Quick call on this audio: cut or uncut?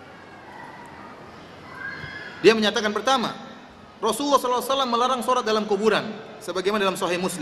uncut